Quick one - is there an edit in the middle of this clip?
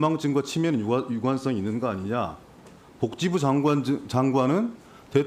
no; 0 cuts

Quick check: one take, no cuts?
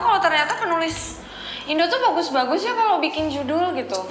yes; 0 cuts

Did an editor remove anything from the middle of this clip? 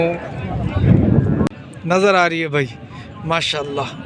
yes; 1 cut; at 1.5 s

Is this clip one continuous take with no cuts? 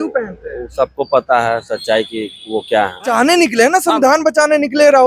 no; 1 cut; at 3.1 s

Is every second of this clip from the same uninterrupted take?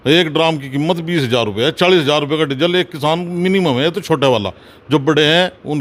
yes; 0 cuts

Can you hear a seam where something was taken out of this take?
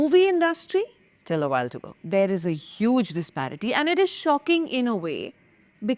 no; 0 cuts

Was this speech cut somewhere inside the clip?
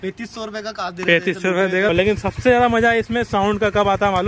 yes; 1 cut; at 1.9 s

